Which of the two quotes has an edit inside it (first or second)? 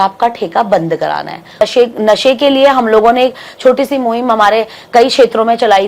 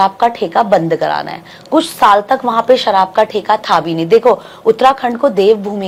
first